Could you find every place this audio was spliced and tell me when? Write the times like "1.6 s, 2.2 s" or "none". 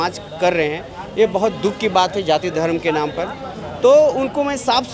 none